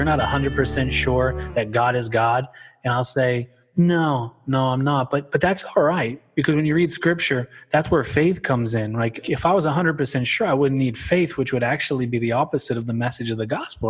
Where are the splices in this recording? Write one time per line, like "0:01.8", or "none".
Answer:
0:06.2
0:09.2